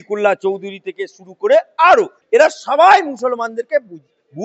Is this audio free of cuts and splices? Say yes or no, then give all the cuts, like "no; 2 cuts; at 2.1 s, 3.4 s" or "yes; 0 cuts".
no; 1 cut; at 2.2 s